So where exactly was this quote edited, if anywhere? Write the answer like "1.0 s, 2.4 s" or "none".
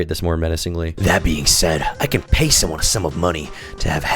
0.9 s